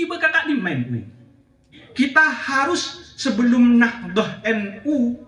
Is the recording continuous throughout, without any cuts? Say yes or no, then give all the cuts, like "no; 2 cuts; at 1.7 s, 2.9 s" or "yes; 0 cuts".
no; 1 cut; at 1.8 s